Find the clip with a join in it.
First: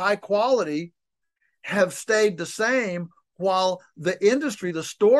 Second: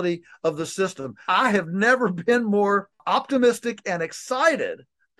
second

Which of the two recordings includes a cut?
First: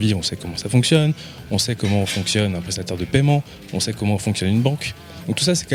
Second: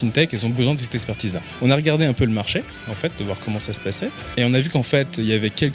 second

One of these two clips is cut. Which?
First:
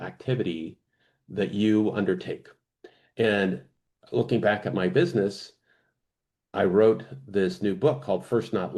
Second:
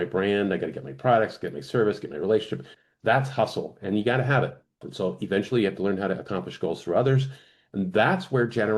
second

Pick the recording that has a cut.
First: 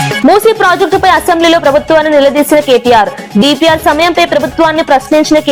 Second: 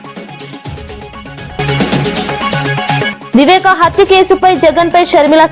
second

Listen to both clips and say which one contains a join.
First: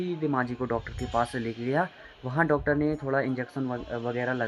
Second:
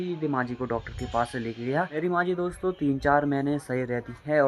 second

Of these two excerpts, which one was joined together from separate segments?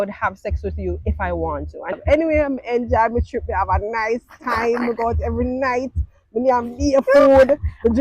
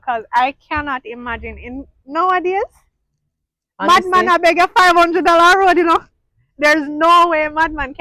first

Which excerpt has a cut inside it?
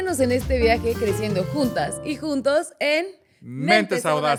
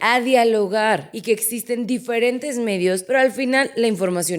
second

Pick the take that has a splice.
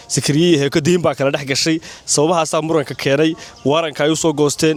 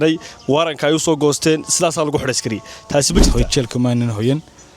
second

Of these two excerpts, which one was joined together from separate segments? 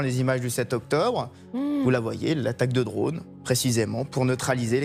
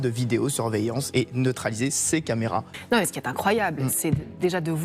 second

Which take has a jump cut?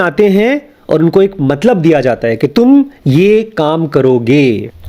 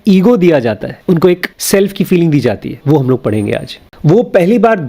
second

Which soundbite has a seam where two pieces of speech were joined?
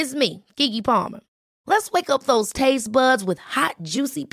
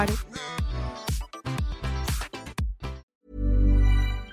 second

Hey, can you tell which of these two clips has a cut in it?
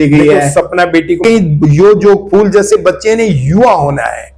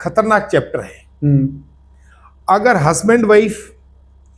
first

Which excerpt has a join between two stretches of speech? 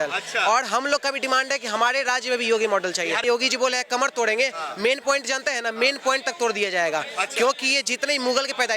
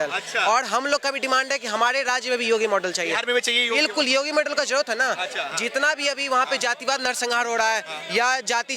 first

